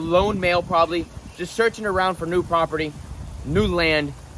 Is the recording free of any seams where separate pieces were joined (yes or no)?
yes